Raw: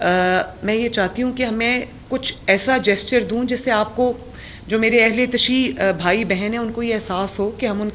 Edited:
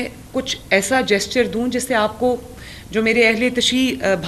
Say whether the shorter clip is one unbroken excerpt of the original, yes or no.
yes